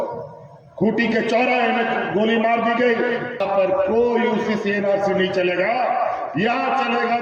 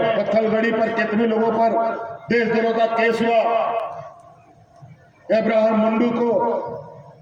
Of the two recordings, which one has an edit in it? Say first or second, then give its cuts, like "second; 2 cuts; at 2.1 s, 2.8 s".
first; 1 cut; at 3.4 s